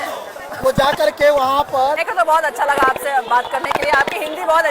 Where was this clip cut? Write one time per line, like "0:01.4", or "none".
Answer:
0:02.0